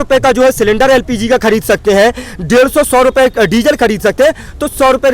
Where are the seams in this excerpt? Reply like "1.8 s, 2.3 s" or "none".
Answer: none